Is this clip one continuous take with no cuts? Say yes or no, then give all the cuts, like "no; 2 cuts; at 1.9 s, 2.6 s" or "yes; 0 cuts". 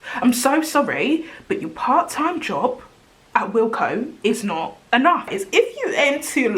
no; 1 cut; at 5.3 s